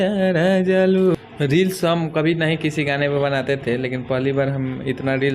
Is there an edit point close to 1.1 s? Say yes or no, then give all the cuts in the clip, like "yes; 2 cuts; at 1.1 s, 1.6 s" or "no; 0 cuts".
yes; 1 cut; at 1.1 s